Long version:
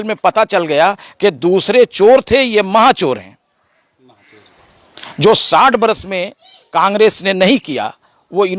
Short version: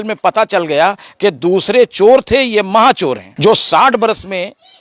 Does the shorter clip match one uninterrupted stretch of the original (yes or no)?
no